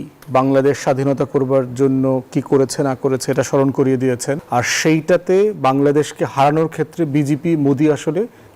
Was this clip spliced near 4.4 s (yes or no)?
yes